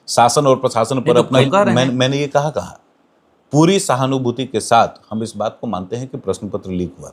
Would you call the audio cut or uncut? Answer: cut